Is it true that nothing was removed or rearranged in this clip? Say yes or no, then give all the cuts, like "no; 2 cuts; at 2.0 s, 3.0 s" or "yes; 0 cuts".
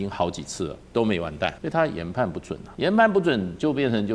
no; 2 cuts; at 1.6 s, 2.6 s